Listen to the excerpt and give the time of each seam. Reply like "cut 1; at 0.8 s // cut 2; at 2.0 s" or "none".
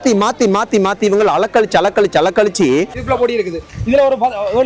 cut 1; at 3.0 s